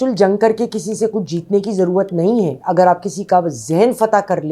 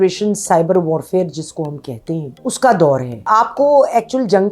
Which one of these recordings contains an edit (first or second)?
second